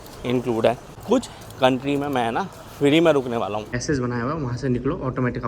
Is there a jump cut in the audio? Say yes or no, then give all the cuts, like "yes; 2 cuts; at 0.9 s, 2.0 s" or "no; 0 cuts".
yes; 2 cuts; at 0.9 s, 3.7 s